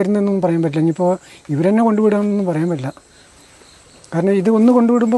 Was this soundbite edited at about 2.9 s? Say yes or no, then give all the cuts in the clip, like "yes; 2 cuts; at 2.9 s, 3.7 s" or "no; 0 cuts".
no; 0 cuts